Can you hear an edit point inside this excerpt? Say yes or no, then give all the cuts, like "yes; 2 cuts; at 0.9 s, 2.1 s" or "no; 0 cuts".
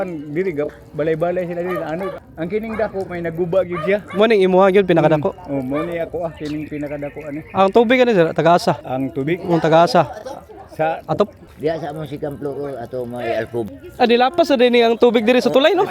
yes; 4 cuts; at 2.2 s, 8.9 s, 11.5 s, 13.7 s